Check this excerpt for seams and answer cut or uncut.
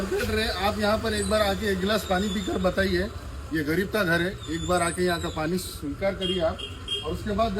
uncut